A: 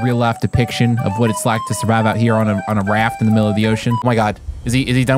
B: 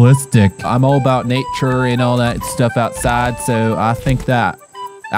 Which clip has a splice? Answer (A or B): A